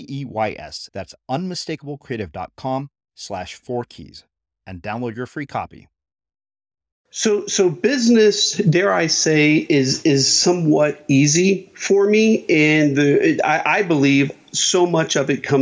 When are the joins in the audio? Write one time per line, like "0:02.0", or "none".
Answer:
0:07.1